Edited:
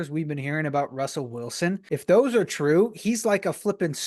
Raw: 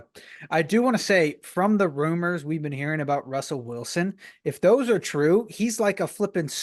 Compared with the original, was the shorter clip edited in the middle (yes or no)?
yes